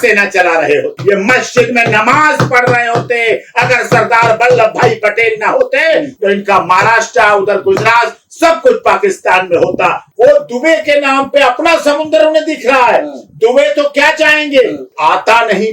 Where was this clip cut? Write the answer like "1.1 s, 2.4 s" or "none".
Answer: 1.0 s, 10.0 s, 15.0 s